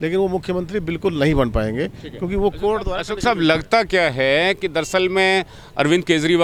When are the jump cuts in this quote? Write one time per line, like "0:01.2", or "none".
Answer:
none